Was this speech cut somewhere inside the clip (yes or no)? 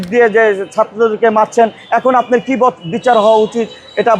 no